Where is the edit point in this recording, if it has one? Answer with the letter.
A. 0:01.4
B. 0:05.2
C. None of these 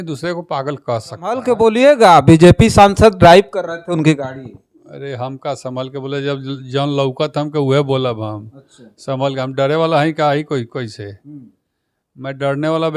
A